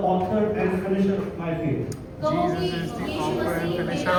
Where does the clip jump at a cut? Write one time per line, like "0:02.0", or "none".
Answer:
none

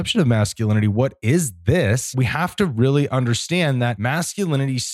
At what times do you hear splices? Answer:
0:02.1
0:04.0

